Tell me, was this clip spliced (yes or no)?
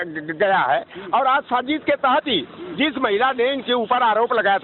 no